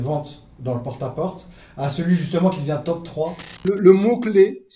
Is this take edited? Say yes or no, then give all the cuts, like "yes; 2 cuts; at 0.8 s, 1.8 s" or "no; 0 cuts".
yes; 1 cut; at 3.6 s